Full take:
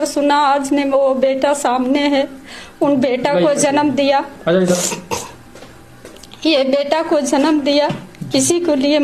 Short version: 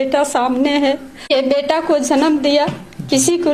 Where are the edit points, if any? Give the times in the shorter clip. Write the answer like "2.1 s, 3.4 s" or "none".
1.3 s